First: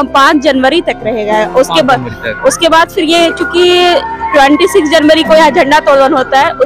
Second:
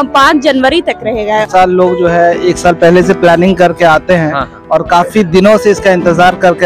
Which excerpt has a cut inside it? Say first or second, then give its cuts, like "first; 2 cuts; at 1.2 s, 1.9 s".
second; 1 cut; at 1.5 s